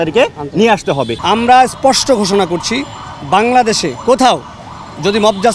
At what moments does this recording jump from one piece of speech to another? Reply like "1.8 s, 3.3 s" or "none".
1.2 s